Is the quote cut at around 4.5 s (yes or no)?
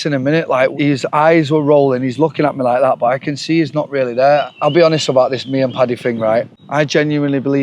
yes